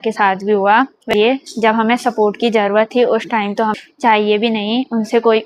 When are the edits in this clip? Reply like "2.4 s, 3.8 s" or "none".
1.1 s, 3.8 s